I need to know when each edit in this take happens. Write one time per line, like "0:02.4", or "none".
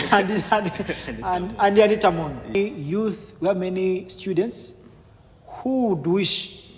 0:02.5